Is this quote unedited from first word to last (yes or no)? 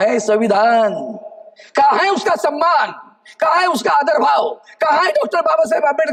yes